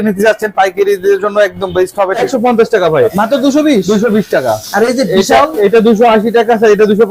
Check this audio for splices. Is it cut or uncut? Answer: cut